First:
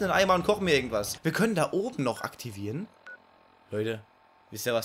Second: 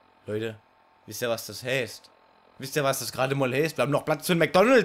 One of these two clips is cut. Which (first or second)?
first